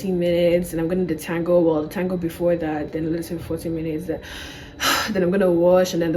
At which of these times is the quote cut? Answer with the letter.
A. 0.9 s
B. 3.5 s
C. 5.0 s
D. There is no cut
D